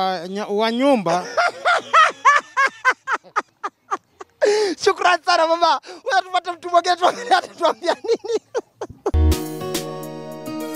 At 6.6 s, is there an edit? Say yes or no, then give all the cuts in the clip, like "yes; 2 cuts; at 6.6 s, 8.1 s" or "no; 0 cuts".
no; 1 cut; at 9.2 s